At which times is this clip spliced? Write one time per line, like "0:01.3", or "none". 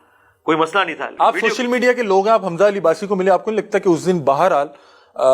0:01.1